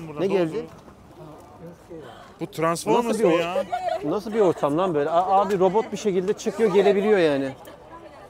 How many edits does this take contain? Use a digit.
0